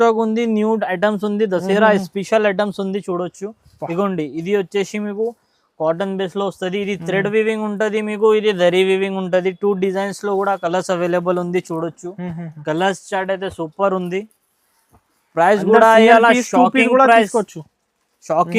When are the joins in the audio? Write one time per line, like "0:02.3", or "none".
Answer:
none